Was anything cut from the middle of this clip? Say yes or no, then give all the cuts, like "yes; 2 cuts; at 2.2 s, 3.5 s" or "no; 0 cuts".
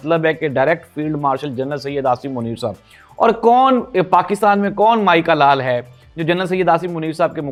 no; 0 cuts